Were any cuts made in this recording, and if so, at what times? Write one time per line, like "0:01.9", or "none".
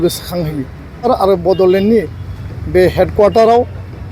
0:01.1